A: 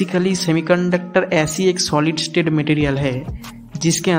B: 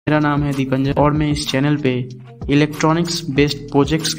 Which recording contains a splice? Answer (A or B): B